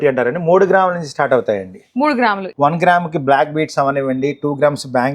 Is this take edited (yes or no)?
yes